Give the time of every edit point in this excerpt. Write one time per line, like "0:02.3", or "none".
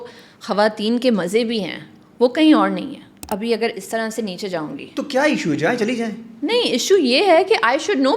0:03.2